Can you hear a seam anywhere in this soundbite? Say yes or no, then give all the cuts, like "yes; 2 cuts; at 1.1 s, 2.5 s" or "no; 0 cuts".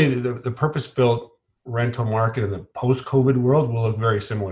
no; 0 cuts